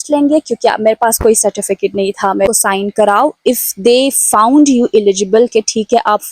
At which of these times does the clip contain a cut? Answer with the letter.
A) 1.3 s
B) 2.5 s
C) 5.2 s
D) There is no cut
B